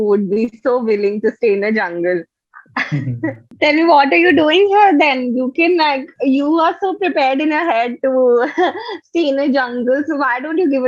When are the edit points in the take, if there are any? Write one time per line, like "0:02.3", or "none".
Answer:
0:03.5